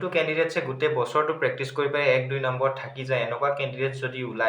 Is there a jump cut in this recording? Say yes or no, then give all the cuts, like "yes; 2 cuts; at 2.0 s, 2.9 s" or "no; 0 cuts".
no; 0 cuts